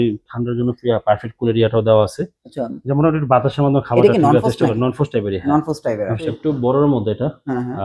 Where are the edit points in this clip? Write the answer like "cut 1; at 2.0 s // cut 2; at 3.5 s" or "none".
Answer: cut 1; at 6.3 s